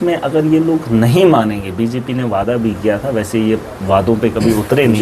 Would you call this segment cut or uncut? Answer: uncut